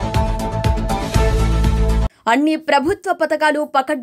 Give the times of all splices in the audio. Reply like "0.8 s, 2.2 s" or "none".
2.1 s

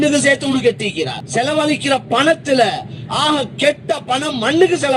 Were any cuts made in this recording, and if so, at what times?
1.2 s

